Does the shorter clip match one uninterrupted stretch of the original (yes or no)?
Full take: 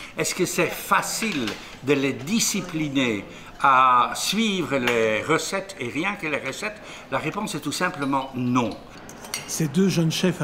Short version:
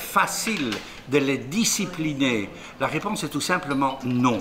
no